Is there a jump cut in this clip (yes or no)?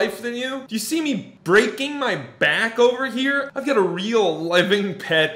yes